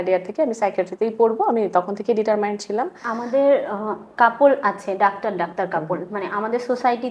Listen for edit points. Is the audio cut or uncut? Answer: cut